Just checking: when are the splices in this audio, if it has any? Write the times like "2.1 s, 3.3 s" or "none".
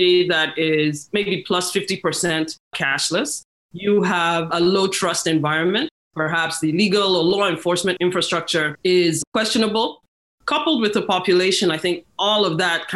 6.0 s, 8.3 s, 10.1 s